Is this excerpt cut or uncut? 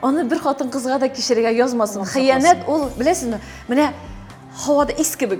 uncut